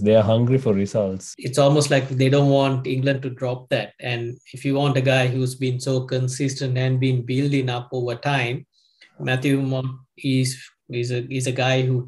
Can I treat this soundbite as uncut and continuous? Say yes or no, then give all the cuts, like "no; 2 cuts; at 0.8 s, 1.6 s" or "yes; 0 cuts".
no; 1 cut; at 1.3 s